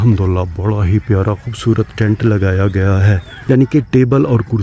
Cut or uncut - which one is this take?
cut